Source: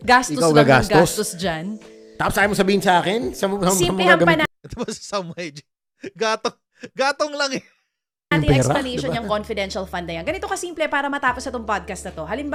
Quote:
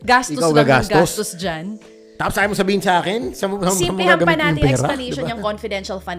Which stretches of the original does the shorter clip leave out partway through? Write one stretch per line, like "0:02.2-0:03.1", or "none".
0:04.4-0:08.3